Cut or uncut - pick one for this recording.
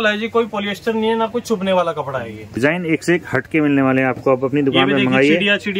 cut